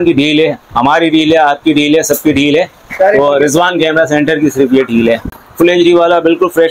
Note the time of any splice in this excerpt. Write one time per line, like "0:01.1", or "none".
0:05.4